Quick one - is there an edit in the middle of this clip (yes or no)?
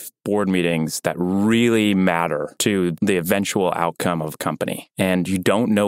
yes